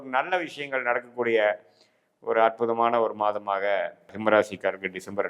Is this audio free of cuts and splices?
no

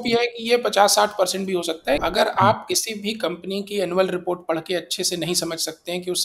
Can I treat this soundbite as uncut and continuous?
no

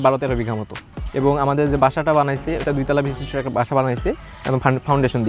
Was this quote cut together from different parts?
no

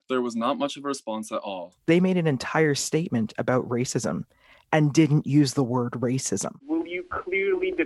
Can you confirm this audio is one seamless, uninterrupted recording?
no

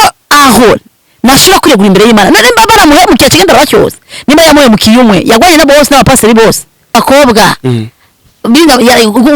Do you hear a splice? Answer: yes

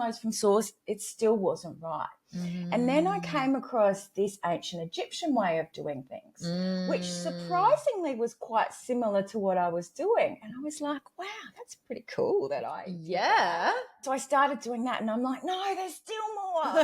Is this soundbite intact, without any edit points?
no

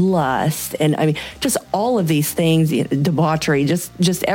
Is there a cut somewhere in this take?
no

